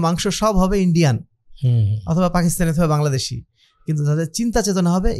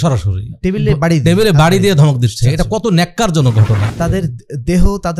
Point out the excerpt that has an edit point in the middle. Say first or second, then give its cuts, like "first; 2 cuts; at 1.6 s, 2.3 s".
second; 1 cut; at 3.8 s